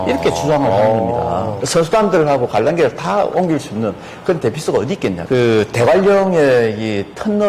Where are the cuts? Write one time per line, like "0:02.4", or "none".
0:01.6
0:05.2

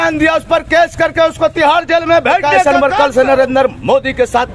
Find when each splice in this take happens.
0:02.5

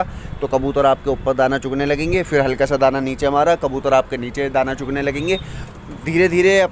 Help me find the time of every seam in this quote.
0:05.6

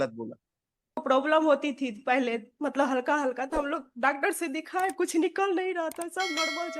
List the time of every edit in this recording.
0:01.0

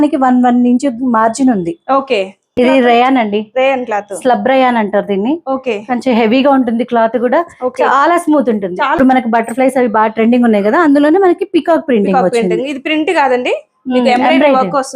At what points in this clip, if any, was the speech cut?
0:02.6
0:09.0

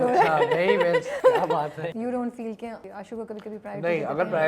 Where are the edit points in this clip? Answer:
0:01.1
0:01.8
0:02.8

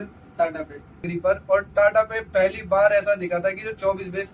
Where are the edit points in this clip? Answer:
0:01.1

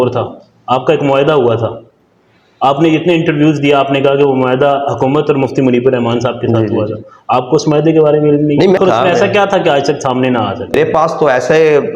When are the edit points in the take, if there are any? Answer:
0:08.8
0:10.8

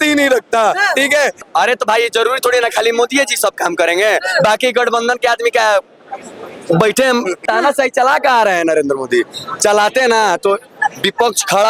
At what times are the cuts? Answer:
0:01.4
0:07.4

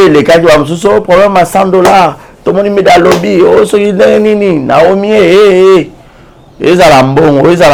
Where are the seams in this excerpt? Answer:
none

